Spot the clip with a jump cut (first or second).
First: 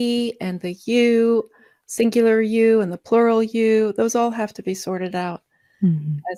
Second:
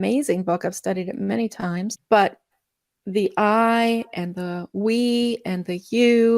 second